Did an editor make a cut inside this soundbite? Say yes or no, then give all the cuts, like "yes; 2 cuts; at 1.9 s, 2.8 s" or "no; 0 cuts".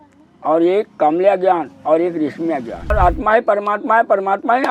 yes; 1 cut; at 2.9 s